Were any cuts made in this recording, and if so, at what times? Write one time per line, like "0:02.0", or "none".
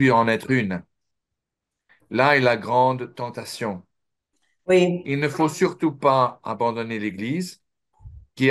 none